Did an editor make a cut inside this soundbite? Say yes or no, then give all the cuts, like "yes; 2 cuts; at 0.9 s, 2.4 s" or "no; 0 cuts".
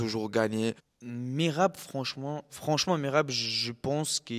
yes; 2 cuts; at 0.9 s, 2.5 s